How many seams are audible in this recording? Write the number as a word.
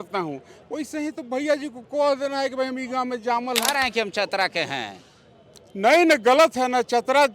one